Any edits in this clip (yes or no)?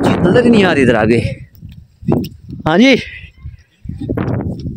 no